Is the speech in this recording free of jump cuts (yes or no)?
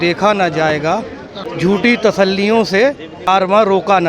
no